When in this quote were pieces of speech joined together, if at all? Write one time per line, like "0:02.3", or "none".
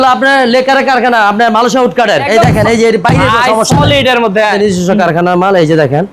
0:02.5
0:04.5